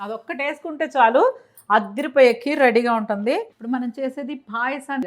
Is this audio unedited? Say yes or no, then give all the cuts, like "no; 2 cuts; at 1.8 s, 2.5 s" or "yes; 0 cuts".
no; 1 cut; at 3.5 s